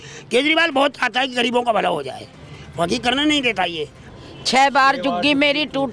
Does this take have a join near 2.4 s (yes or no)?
no